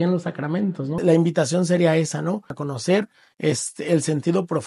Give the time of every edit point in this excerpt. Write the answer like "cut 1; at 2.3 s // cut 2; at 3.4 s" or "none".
cut 1; at 0.9 s // cut 2; at 2.6 s